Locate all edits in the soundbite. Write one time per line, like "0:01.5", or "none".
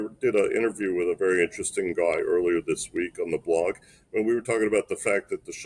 none